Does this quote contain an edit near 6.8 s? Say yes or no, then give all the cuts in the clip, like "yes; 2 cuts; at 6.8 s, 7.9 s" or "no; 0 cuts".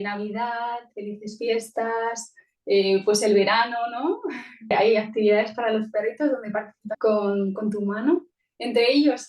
yes; 2 cuts; at 4.7 s, 6.8 s